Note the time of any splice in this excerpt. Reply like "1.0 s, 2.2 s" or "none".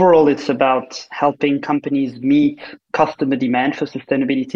none